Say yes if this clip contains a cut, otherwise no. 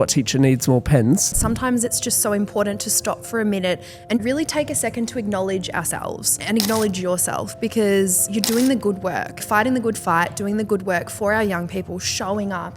yes